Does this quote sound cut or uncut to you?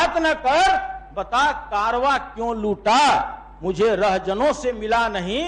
uncut